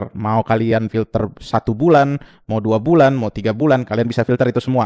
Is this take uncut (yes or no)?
yes